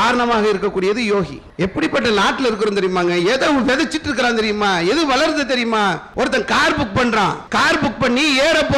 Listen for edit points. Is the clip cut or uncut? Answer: cut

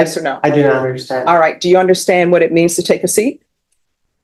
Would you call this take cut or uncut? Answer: uncut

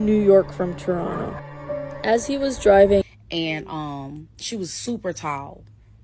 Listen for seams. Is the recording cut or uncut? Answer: cut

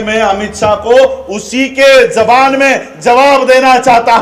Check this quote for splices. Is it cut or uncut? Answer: uncut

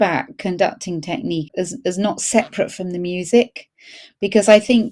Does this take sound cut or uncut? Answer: cut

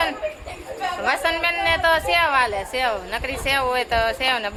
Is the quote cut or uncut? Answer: uncut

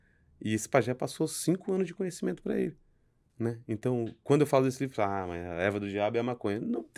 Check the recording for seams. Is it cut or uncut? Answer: uncut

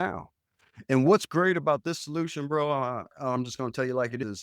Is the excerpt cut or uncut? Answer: uncut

